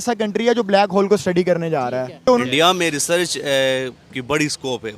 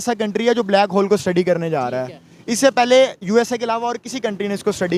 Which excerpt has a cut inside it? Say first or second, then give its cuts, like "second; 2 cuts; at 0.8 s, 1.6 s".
first; 1 cut; at 2.2 s